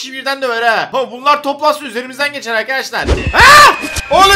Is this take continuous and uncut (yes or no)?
no